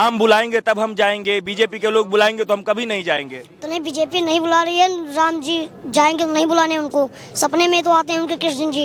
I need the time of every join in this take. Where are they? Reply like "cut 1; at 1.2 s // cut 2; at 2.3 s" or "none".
none